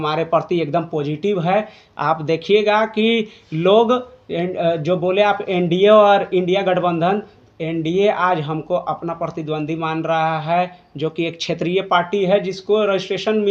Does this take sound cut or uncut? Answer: uncut